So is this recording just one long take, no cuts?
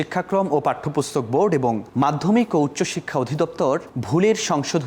no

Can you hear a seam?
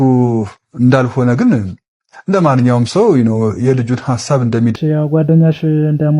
yes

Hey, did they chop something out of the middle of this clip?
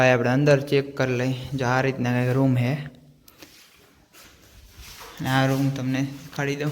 yes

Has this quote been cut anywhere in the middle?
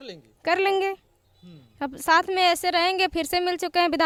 no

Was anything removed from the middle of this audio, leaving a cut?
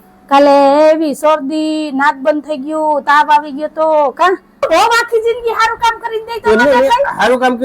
yes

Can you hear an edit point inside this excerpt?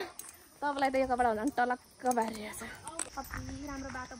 yes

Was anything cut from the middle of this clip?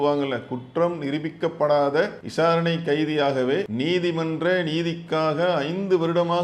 yes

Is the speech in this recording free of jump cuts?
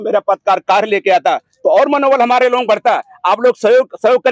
yes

